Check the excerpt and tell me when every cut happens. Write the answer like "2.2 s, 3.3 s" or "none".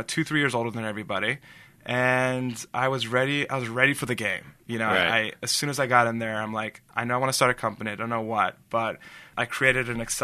9.3 s